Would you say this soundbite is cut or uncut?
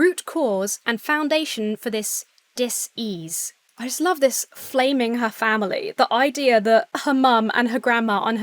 cut